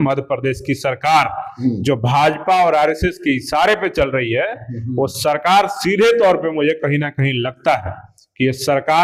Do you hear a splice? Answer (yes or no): no